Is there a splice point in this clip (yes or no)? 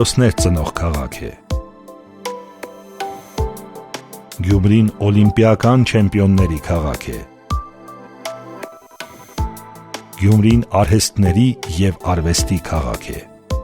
yes